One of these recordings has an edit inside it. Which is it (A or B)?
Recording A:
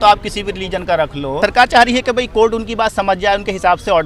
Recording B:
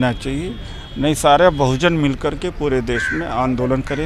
A